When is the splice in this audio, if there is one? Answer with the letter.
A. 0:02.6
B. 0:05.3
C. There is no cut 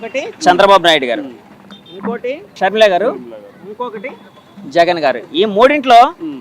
A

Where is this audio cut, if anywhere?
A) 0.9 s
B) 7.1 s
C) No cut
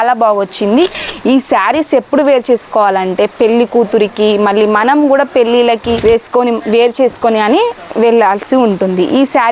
A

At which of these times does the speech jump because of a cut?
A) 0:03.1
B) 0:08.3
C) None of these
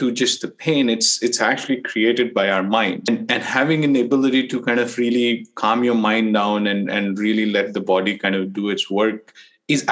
C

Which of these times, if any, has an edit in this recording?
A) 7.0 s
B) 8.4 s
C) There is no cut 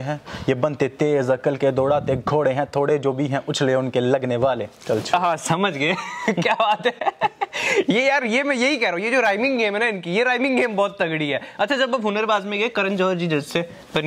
C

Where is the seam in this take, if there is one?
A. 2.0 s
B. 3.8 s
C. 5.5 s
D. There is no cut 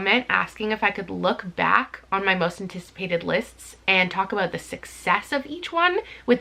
D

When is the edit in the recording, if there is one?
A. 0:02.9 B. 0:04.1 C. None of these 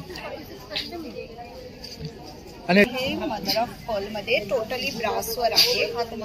A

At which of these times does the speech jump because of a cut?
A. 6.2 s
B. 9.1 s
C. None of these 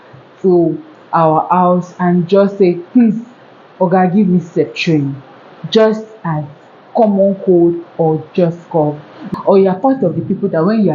B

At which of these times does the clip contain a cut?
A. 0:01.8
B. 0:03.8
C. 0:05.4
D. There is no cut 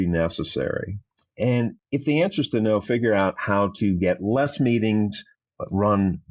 A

